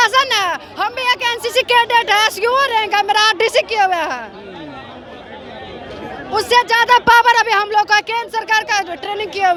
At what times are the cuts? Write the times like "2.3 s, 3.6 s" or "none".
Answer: none